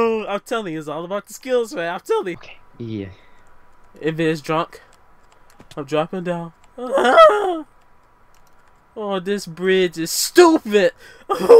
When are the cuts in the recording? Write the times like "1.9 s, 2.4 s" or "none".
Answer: 2.4 s